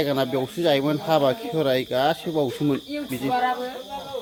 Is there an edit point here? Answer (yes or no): no